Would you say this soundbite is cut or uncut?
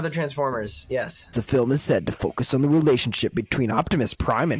cut